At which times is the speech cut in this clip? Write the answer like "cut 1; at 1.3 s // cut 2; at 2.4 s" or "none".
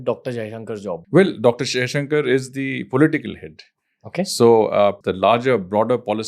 cut 1; at 0.9 s // cut 2; at 5.0 s